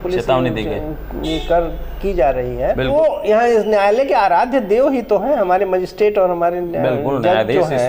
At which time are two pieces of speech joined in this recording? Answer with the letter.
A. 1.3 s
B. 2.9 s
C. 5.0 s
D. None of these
B